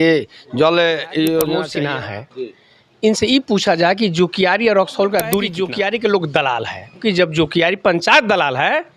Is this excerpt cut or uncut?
cut